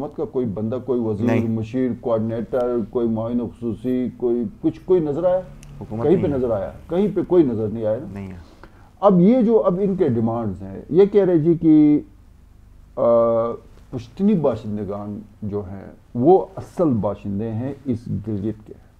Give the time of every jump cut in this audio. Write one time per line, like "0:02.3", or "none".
none